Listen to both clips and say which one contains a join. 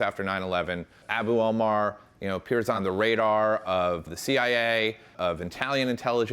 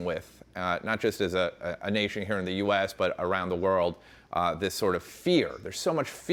first; 4 cuts; at 1.0 s, 2.8 s, 4.0 s, 5.1 s

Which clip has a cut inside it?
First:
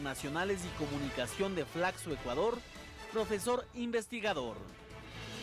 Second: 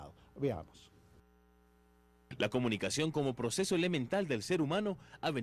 second; 1 cut; at 3.2 s

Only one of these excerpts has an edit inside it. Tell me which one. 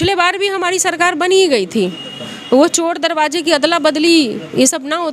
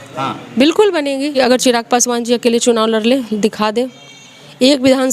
second; 1 cut; at 1.4 s

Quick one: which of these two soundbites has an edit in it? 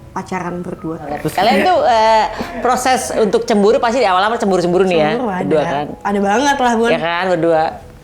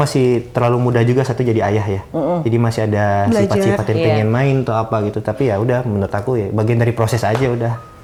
first; 1 cut; at 1.2 s

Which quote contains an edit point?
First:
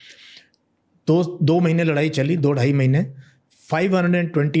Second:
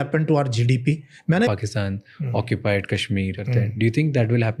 second; 2 cuts; at 1.5 s, 3.4 s

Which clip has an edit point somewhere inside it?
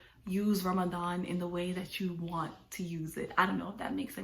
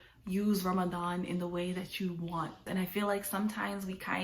second; 1 cut; at 2.6 s

